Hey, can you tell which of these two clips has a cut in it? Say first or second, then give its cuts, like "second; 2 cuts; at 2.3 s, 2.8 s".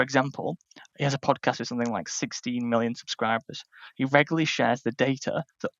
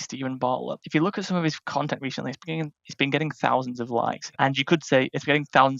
second; 2 cuts; at 0.8 s, 4.2 s